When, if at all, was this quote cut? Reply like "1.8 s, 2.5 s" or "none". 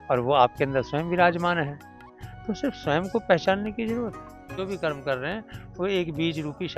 4.6 s